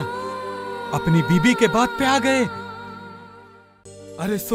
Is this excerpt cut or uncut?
uncut